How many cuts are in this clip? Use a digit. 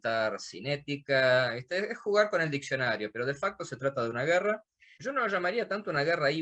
1